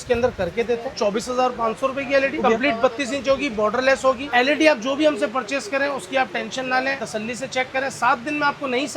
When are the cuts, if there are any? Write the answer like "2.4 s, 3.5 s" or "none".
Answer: 0.9 s, 2.4 s, 4.2 s, 7.0 s